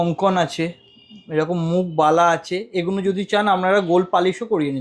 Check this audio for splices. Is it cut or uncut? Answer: uncut